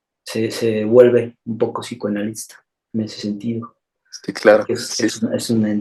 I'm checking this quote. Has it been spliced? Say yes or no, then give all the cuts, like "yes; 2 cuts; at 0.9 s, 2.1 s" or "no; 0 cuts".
no; 0 cuts